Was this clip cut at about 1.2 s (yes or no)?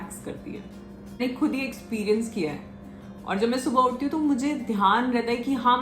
yes